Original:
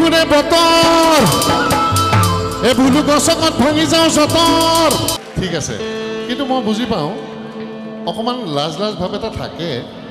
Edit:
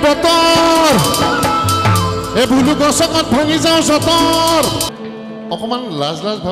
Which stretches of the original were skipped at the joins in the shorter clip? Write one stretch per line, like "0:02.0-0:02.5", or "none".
0:05.2-0:07.5